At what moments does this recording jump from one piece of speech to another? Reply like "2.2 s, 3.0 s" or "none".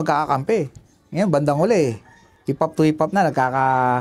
none